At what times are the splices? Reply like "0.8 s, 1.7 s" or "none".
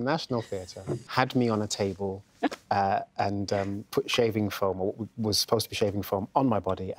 1.0 s